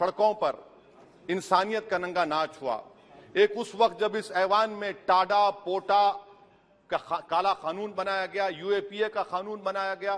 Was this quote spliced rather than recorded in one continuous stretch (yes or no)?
no